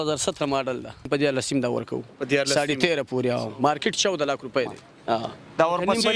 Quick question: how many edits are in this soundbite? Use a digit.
1